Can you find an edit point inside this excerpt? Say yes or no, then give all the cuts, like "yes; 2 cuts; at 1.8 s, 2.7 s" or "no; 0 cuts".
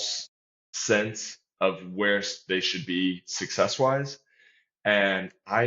no; 0 cuts